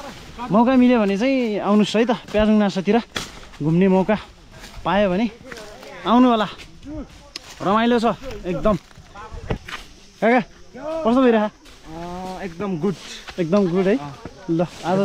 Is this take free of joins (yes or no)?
no